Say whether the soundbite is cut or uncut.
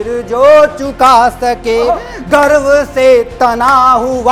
uncut